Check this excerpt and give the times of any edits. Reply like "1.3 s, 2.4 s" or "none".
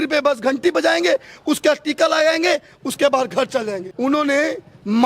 3.9 s